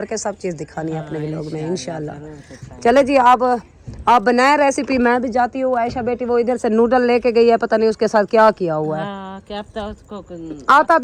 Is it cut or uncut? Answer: uncut